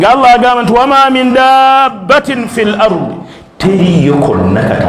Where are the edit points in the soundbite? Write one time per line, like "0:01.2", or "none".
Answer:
none

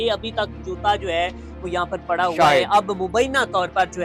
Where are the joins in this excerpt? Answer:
none

